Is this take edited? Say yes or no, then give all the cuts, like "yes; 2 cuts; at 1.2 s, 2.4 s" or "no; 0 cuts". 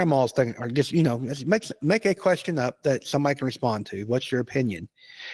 no; 0 cuts